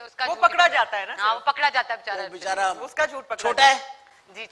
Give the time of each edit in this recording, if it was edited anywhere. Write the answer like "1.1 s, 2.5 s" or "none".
none

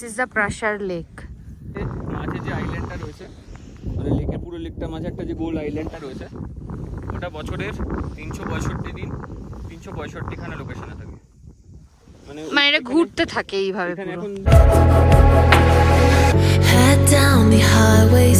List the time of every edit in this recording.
1.8 s, 14.5 s

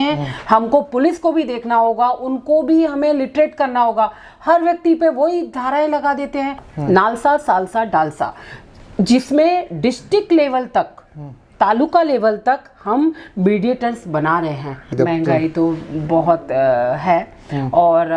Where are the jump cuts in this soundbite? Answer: 6.7 s, 14.9 s

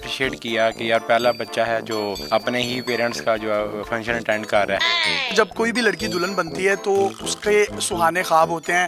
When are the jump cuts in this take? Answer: 4.9 s

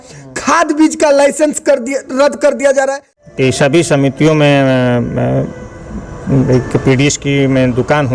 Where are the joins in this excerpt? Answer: 3.1 s

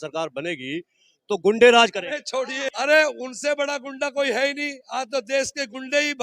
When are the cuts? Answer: 2.7 s

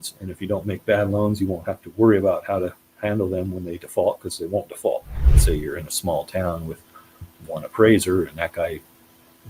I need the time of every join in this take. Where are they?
5.3 s

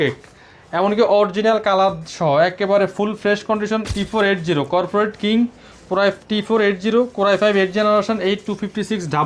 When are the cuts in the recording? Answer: 3.9 s

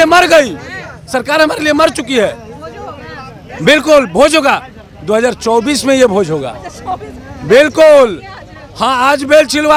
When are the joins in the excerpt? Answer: none

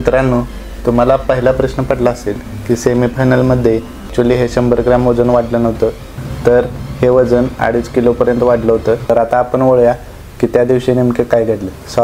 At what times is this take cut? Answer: 4.1 s, 9.1 s

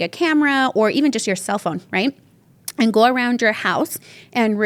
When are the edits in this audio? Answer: none

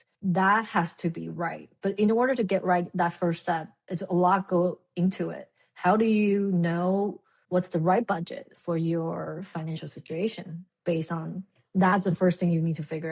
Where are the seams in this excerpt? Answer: none

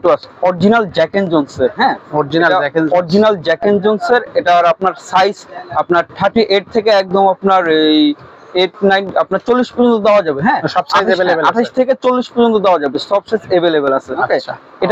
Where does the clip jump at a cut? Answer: none

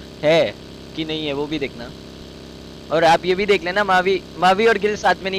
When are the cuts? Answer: none

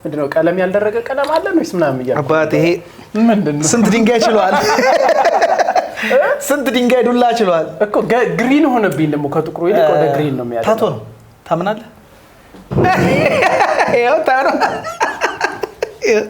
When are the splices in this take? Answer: none

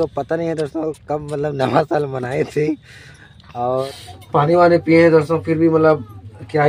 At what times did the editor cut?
3.8 s

